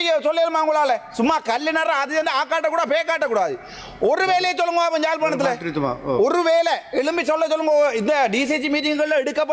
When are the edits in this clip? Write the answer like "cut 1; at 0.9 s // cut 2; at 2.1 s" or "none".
none